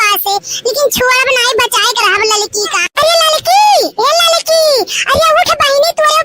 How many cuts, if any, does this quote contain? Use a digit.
1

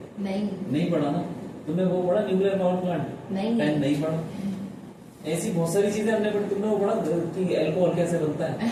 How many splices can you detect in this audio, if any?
0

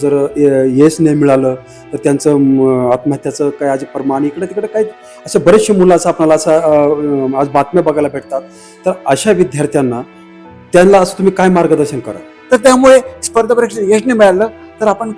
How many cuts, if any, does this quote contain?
1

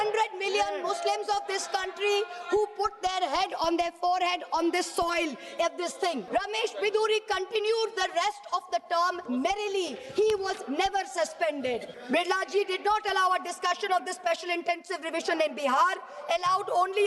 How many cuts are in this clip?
2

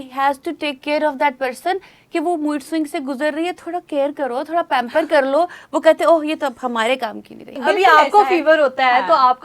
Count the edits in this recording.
1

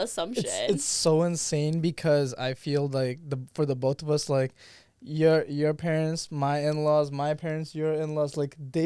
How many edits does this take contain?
0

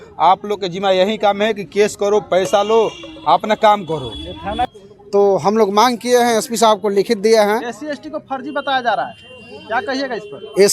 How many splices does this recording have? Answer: 1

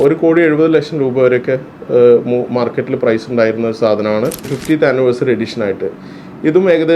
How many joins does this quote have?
1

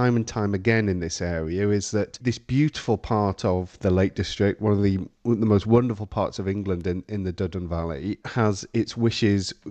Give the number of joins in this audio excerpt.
3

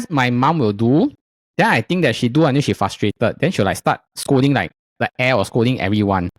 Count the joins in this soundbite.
0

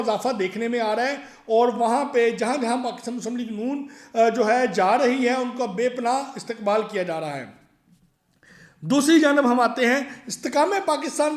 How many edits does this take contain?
0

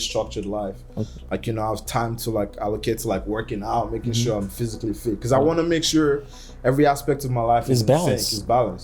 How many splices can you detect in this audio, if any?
0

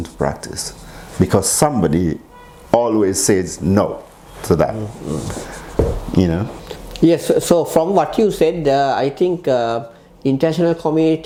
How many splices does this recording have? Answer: 0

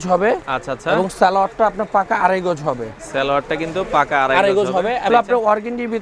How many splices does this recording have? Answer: 1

